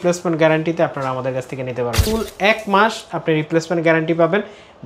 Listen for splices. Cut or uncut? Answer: cut